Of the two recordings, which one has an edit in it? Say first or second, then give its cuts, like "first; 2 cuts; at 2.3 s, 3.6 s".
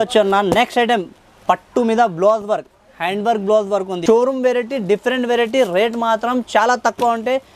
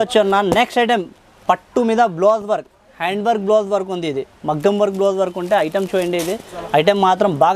first; 1 cut; at 4.0 s